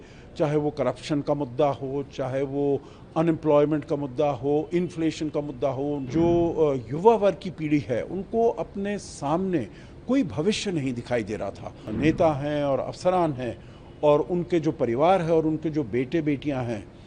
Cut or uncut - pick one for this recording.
cut